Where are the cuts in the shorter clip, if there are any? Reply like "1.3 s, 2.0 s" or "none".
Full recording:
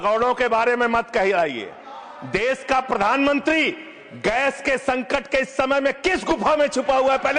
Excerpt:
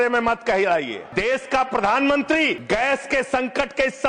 1.0 s, 2.6 s